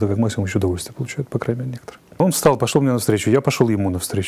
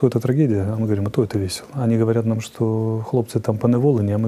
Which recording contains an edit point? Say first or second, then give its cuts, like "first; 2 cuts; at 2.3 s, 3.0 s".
first; 1 cut; at 2.2 s